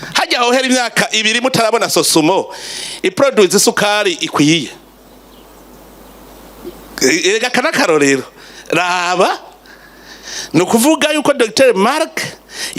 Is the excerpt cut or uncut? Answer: uncut